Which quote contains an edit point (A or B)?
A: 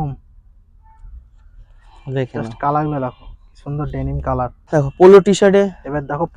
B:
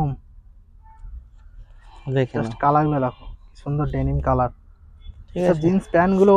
A